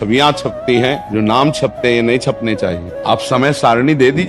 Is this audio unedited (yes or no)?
no